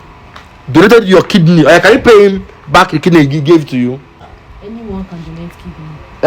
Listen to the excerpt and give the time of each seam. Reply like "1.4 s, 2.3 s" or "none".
4.4 s